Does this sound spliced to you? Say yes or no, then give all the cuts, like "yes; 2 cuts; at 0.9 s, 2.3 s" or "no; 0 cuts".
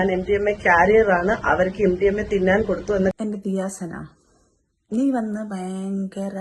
yes; 1 cut; at 3.2 s